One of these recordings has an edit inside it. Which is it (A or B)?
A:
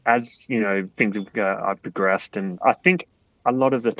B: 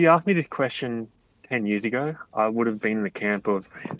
A